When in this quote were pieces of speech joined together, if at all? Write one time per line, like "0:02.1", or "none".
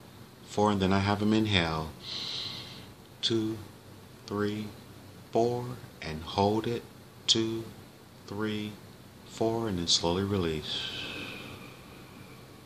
0:03.1